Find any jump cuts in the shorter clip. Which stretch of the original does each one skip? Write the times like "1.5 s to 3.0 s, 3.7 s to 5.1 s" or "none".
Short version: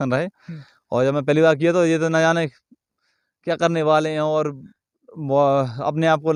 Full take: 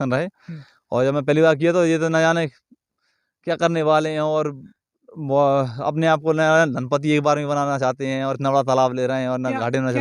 none